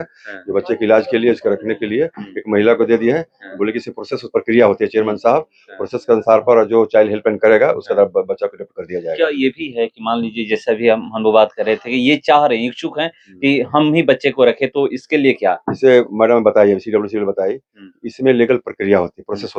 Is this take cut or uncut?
uncut